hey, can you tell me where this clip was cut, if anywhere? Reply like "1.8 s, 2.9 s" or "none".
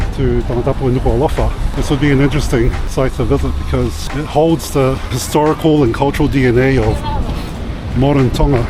1.6 s, 2.8 s, 4.0 s, 5.2 s